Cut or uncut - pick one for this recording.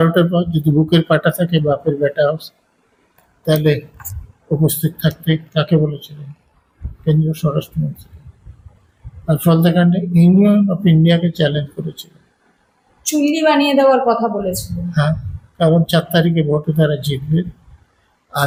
uncut